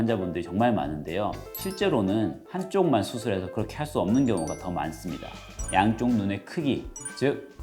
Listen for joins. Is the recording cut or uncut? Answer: cut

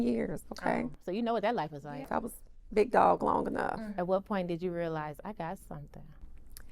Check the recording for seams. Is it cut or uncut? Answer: cut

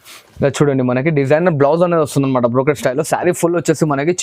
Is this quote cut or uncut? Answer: uncut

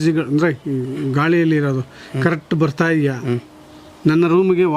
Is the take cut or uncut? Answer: uncut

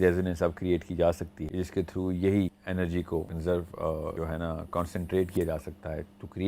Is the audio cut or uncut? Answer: cut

